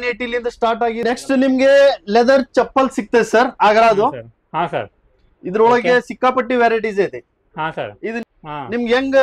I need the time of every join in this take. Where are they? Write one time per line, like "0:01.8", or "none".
0:01.0
0:08.2